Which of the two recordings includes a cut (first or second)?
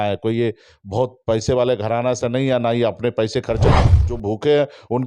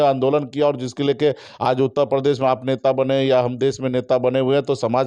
first